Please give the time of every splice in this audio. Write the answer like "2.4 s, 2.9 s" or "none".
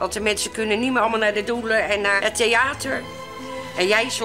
2.2 s